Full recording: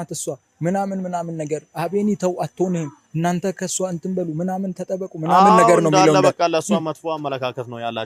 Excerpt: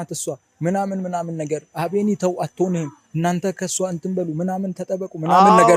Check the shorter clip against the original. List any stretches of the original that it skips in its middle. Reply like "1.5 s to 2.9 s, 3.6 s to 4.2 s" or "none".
none